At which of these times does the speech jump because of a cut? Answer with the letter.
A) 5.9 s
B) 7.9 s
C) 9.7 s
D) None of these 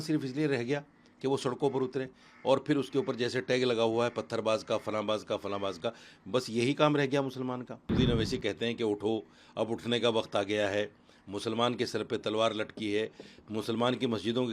B